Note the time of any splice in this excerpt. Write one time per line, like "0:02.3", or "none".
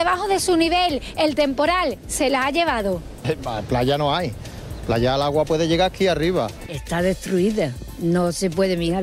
0:03.2
0:06.6